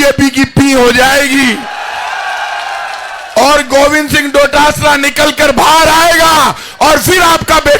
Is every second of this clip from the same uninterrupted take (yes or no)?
yes